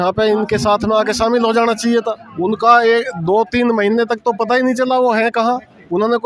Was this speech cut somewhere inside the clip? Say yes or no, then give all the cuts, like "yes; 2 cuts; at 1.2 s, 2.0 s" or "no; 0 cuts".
yes; 1 cut; at 2.2 s